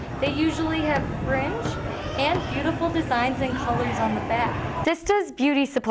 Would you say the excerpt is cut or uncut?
cut